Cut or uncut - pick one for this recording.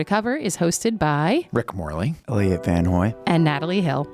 cut